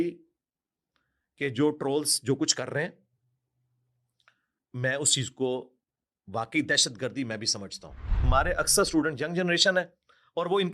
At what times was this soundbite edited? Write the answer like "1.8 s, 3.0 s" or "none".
8.3 s